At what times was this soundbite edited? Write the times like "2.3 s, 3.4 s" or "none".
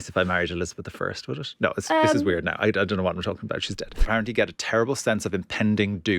4.0 s

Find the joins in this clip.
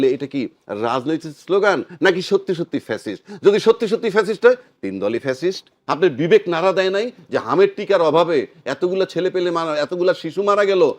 5.8 s

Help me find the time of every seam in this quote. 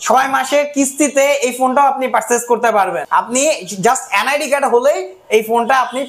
3.0 s

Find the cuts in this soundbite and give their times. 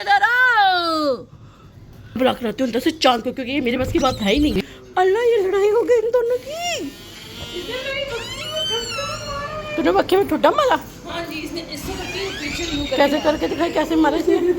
4.6 s

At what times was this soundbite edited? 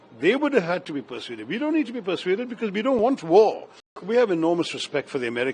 4.0 s

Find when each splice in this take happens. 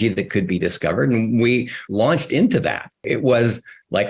3.0 s

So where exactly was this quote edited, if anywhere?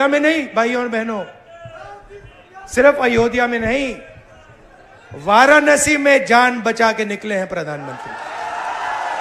none

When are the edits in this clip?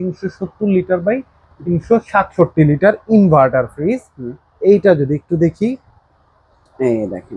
none

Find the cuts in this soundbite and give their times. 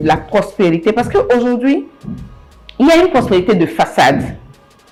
none

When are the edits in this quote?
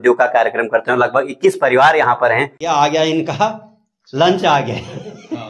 2.5 s

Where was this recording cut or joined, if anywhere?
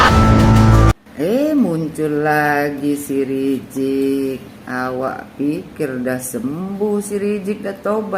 0.9 s

